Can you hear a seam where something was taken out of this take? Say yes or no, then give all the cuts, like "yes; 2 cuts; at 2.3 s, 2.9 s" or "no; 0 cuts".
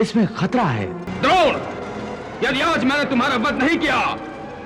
yes; 1 cut; at 1.0 s